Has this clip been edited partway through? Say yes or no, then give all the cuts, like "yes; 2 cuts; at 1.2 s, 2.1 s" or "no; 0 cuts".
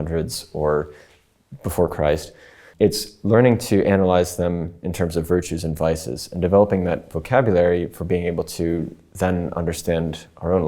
yes; 1 cut; at 2.6 s